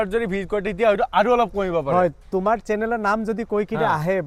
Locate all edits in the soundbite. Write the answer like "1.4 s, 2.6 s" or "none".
none